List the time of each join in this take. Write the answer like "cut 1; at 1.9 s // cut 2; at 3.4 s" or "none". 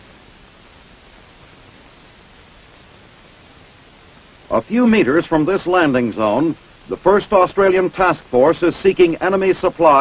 cut 1; at 3.6 s